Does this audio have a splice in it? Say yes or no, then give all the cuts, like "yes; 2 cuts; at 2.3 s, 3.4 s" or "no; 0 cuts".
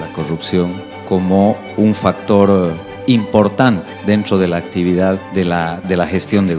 yes; 3 cuts; at 0.9 s, 3.9 s, 5.8 s